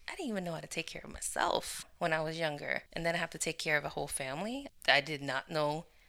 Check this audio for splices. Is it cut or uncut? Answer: cut